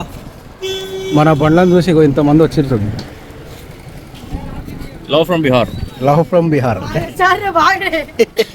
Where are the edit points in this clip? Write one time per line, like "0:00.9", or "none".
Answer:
none